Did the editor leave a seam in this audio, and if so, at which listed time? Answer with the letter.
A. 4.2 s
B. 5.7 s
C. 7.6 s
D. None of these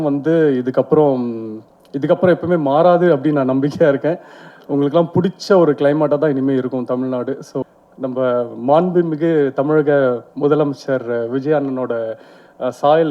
C